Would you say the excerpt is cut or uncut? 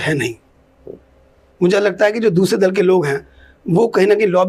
uncut